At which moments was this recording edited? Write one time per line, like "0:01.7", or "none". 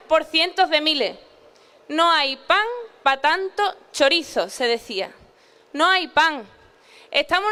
none